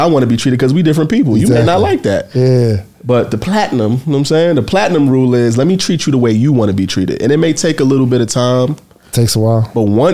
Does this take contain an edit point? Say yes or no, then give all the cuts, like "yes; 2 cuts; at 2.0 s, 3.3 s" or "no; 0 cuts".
no; 0 cuts